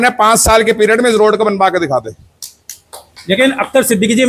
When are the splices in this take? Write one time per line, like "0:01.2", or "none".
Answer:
none